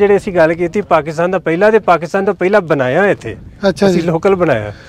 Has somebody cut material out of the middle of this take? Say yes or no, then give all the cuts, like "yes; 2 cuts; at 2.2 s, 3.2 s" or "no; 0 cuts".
no; 0 cuts